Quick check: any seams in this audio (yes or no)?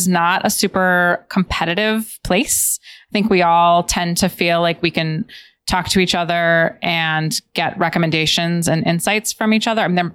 no